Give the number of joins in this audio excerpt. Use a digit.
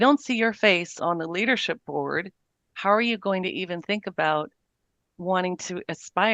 1